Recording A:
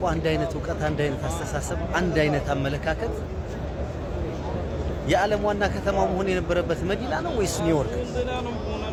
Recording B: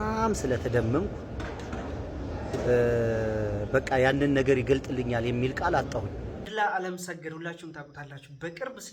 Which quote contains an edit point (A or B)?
B